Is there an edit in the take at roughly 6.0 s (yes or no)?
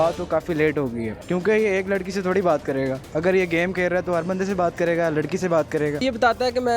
yes